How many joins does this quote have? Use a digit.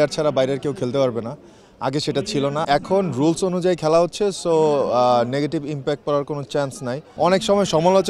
2